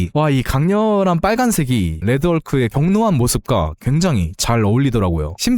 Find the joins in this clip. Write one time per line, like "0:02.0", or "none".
0:02.0